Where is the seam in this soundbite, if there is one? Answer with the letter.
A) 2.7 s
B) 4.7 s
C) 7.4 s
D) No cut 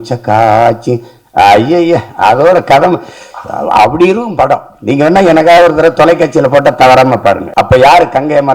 C